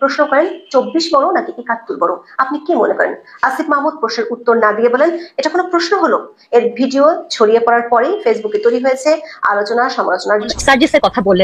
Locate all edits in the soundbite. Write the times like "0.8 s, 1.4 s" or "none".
10.5 s